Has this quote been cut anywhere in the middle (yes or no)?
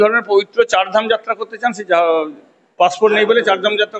no